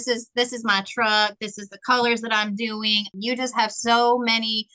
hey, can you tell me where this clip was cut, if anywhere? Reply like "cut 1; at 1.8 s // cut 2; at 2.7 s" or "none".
cut 1; at 3.1 s

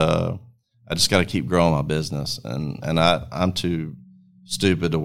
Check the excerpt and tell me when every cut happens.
none

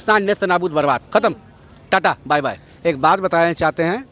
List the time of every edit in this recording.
cut 1; at 2.7 s

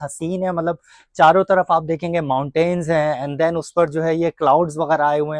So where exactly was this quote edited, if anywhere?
none

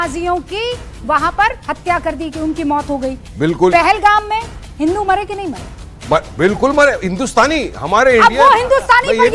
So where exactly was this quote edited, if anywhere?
none

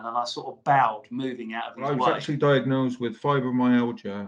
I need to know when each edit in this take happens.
cut 1; at 2.1 s

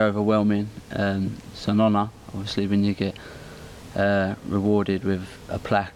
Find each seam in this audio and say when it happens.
none

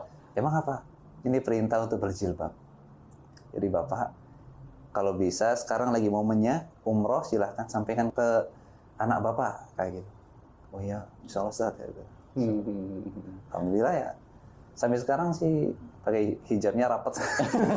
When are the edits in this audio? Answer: cut 1; at 8.1 s

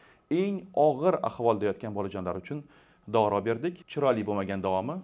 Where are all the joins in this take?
cut 1; at 3.8 s

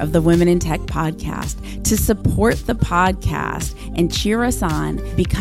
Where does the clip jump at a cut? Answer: none

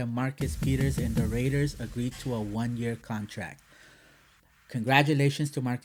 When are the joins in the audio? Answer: none

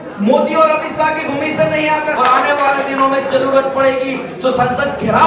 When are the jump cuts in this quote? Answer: cut 1; at 2.1 s

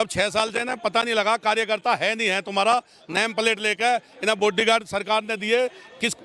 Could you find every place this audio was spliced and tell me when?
none

